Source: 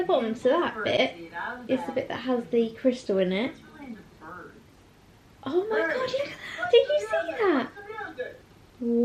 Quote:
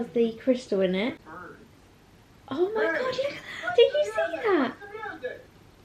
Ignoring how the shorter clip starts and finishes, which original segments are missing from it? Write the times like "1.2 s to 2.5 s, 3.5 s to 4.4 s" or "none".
3.7 s to 4.3 s